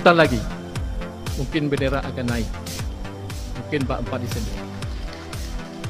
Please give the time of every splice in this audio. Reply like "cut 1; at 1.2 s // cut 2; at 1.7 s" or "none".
none